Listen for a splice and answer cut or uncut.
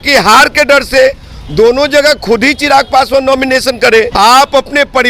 cut